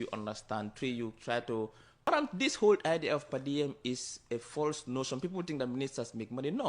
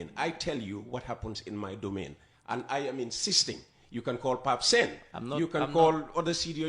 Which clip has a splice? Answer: first; 1 cut; at 2.1 s

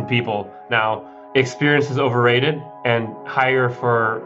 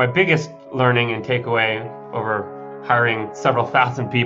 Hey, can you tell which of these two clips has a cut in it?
first; 1 cut; at 1.2 s

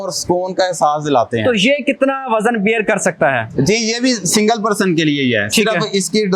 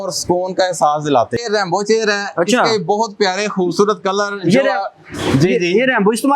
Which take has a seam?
second; 1 cut; at 1.4 s

